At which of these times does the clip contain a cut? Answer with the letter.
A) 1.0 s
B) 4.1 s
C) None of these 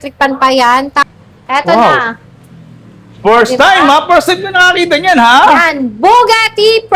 A